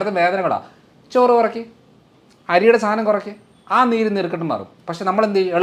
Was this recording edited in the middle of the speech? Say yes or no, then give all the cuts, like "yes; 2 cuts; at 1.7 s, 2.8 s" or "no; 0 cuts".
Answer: no; 0 cuts